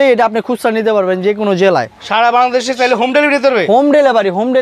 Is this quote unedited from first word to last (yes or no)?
yes